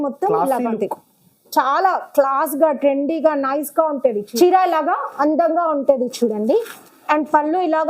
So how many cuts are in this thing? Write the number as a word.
one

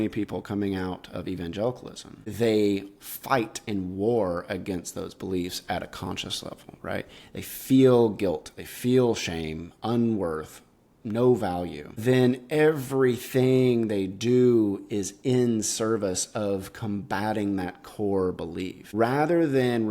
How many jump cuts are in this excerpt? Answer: three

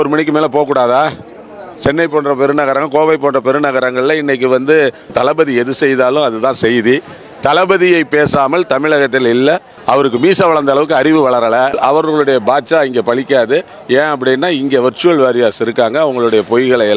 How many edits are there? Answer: three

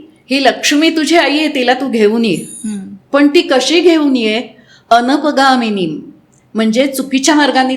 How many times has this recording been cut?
zero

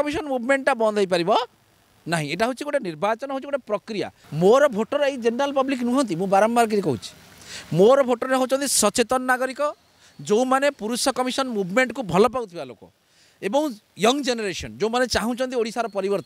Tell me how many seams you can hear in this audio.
one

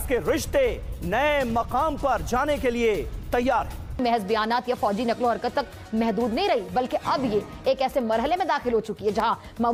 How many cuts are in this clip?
zero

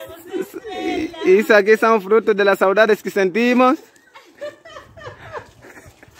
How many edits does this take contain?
zero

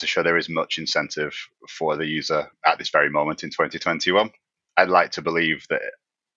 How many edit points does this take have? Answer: two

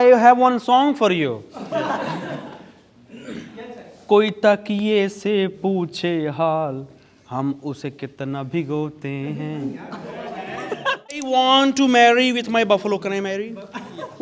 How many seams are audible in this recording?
one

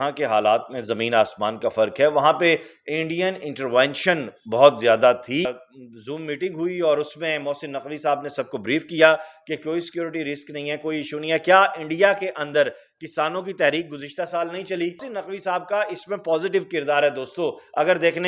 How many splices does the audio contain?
two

